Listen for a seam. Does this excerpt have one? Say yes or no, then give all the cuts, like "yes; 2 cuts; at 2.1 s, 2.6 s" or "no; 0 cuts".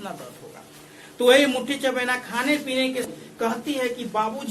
yes; 1 cut; at 3.1 s